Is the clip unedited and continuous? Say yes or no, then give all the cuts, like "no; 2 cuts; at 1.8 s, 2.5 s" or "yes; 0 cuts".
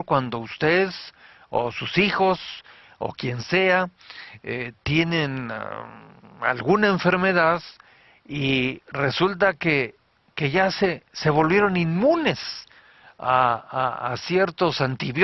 no; 1 cut; at 7.2 s